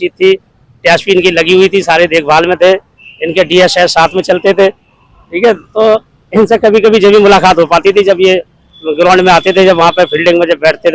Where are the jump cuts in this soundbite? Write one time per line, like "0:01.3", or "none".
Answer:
none